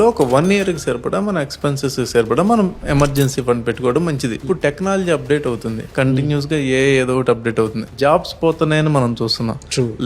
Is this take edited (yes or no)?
yes